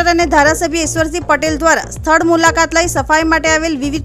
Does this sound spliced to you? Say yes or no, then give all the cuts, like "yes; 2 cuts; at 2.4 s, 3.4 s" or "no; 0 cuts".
no; 0 cuts